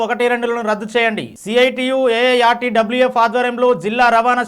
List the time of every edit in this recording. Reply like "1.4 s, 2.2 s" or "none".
none